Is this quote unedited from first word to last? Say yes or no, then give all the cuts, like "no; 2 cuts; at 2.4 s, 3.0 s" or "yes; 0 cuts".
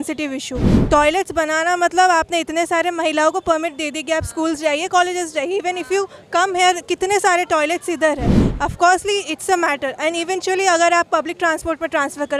yes; 0 cuts